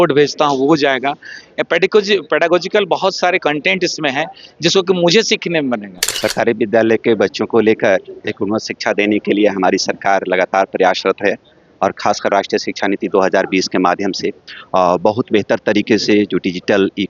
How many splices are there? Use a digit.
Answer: 1